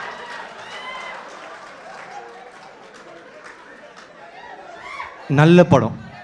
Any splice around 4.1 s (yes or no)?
yes